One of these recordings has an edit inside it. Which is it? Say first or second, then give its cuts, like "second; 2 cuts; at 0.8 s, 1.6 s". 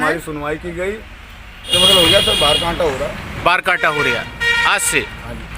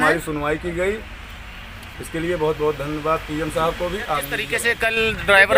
first; 1 cut; at 1.7 s